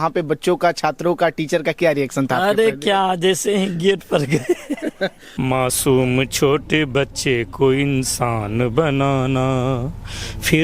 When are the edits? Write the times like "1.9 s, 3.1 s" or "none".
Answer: 5.2 s